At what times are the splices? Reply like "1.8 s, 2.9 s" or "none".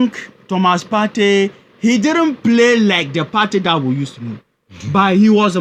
none